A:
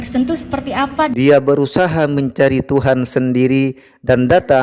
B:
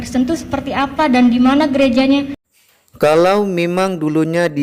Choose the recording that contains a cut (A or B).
A